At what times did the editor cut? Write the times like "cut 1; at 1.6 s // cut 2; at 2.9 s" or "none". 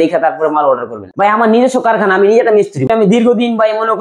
cut 1; at 1.0 s // cut 2; at 2.9 s